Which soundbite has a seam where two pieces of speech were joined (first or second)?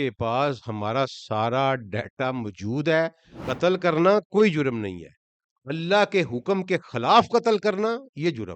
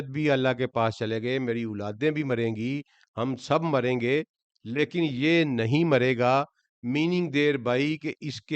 first